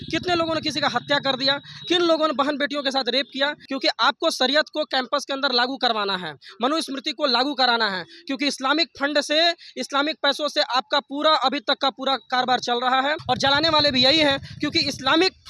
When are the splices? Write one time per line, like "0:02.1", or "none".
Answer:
0:03.6
0:13.2